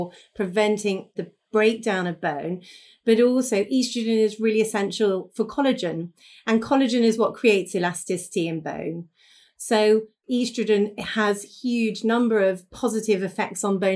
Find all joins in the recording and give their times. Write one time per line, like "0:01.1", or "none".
0:01.1